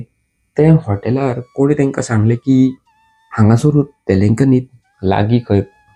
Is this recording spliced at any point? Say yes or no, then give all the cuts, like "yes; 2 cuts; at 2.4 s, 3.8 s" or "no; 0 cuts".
no; 0 cuts